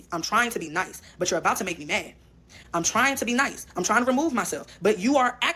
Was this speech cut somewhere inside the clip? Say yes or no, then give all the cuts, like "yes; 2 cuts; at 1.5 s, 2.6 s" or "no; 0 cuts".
no; 0 cuts